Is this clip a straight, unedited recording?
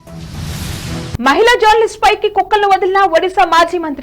no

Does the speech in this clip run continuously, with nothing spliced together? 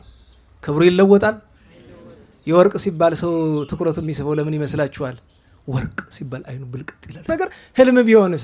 no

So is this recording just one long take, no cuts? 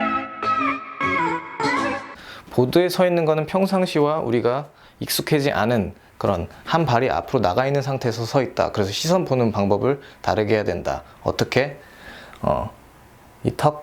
no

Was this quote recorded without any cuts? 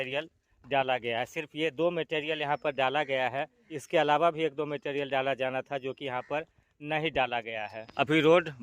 yes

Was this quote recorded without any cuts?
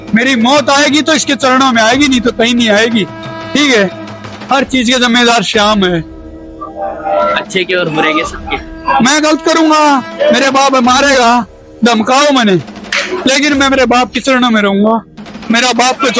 yes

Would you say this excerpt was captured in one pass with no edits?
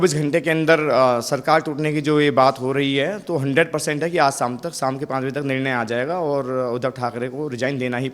yes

